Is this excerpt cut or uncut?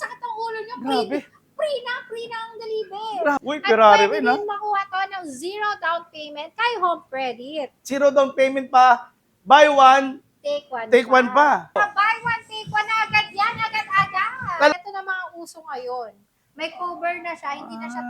cut